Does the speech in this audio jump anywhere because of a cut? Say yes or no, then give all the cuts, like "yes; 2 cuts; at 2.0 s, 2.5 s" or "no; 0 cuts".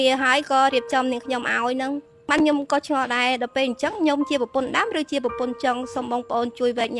yes; 1 cut; at 2.3 s